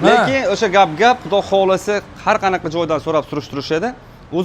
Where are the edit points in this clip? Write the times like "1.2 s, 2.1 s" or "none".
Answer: none